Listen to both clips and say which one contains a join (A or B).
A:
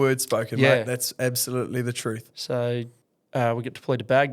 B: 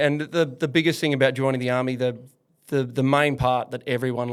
A